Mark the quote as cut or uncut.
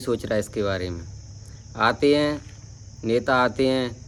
uncut